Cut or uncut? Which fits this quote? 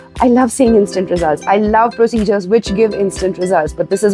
uncut